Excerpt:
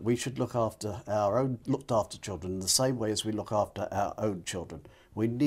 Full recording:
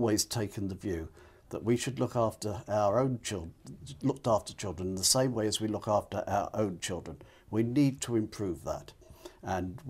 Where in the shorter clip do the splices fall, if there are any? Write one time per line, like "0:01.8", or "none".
0:01.6